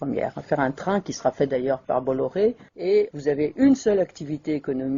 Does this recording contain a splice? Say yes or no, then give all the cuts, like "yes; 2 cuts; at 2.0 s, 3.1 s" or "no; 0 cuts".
no; 0 cuts